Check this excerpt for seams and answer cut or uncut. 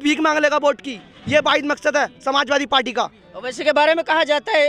uncut